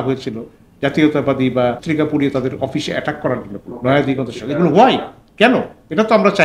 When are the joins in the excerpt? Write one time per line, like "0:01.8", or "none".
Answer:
0:01.8
0:03.7